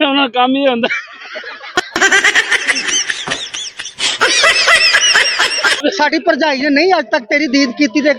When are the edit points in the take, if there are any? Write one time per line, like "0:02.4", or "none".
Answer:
0:05.8